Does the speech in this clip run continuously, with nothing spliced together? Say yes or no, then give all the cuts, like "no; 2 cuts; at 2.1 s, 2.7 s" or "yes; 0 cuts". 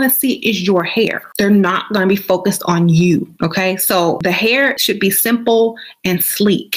yes; 0 cuts